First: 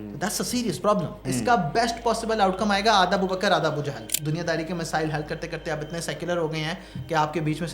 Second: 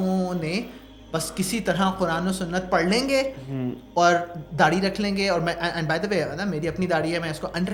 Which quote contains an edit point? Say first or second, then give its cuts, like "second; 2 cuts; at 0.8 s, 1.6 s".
first; 2 cuts; at 1.2 s, 4.1 s